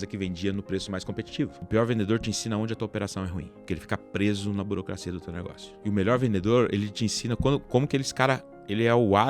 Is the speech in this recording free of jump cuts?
no; 3 cuts; at 1.6 s, 3.4 s, 5.6 s

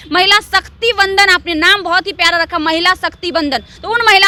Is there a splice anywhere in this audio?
no; 0 cuts

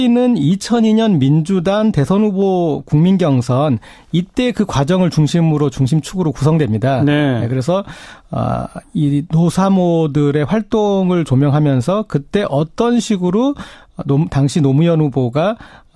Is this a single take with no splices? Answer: no; 1 cut; at 13.4 s

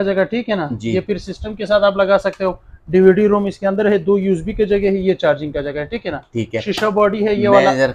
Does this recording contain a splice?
no; 0 cuts

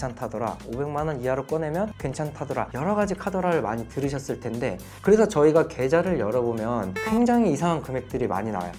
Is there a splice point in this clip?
no; 0 cuts

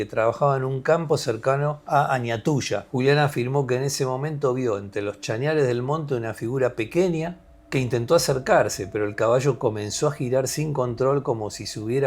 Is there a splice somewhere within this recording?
yes; 2 cuts; at 1.8 s, 2.9 s

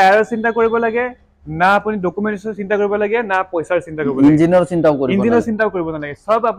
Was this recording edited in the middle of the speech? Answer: no; 0 cuts

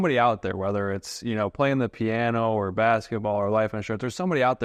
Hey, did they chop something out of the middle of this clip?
no; 0 cuts

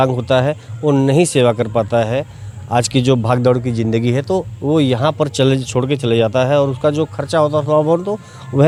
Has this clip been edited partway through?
no; 0 cuts

